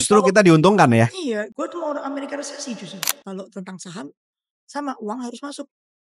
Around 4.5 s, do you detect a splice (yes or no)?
no